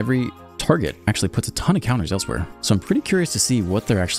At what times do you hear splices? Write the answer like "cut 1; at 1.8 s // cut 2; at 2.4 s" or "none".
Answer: cut 1; at 2.5 s